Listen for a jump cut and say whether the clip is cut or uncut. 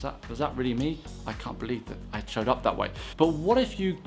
cut